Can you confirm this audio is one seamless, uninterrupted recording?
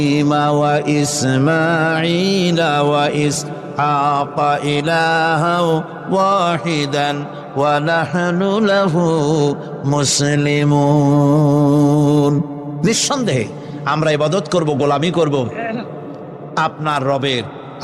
yes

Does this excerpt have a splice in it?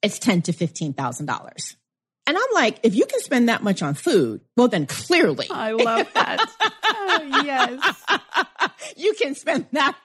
no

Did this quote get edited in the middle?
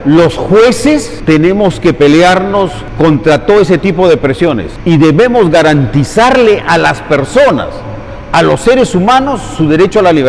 yes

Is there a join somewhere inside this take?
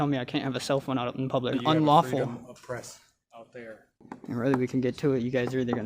yes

